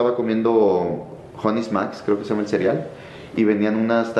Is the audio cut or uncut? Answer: uncut